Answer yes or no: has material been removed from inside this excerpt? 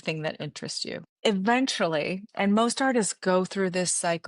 yes